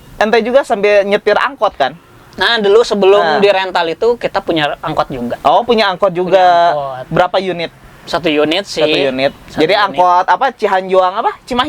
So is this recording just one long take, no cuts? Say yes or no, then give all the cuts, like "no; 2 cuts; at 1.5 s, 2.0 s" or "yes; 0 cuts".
yes; 0 cuts